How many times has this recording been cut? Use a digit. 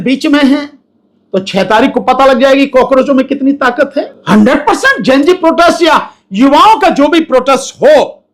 1